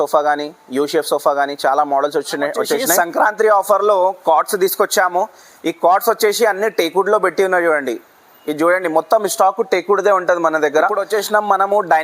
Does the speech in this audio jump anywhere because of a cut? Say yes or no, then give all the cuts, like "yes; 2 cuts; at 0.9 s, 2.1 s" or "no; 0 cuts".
yes; 2 cuts; at 2.9 s, 11.0 s